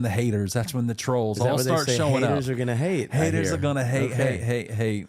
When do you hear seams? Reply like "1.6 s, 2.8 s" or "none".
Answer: none